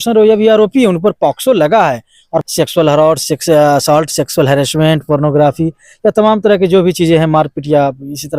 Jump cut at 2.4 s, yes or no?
yes